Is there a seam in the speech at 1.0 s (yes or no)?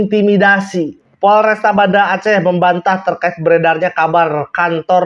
yes